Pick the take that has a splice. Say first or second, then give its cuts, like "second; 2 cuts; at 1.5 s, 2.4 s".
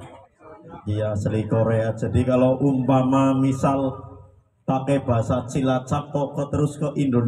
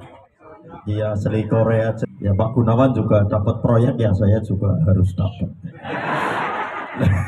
second; 1 cut; at 2.0 s